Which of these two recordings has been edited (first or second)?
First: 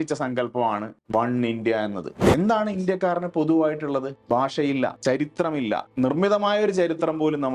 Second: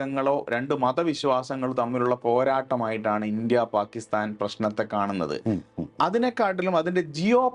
first